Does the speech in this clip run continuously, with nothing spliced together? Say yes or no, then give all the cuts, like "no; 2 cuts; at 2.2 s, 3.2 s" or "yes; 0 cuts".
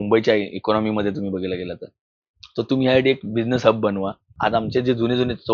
no; 1 cut; at 4.3 s